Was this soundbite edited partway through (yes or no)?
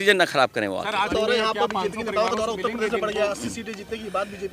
yes